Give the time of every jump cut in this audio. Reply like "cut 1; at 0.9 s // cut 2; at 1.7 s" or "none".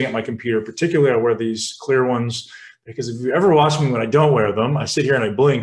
none